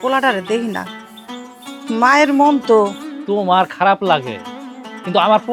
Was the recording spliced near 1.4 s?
no; 1 cut; at 3.1 s

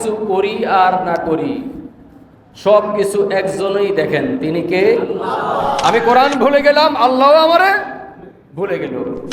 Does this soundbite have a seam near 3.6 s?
no; 1 cut; at 5.8 s

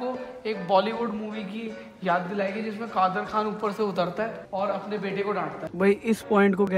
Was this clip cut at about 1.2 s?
no; 2 cuts; at 4.4 s, 5.6 s

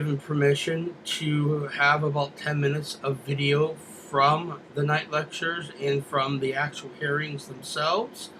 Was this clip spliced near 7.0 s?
yes; 1 cut; at 7.0 s

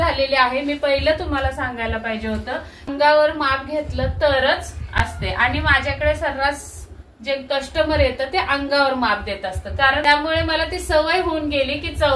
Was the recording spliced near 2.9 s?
yes; 2 cuts; at 2.9 s, 10.0 s

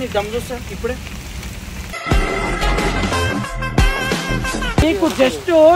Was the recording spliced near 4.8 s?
yes; 1 cut; at 4.8 s

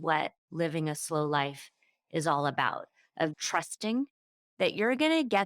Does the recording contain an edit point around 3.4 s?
yes; 1 cut; at 3.4 s

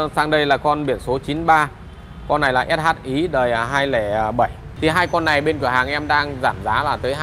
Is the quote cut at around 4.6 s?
yes; 1 cut; at 4.6 s

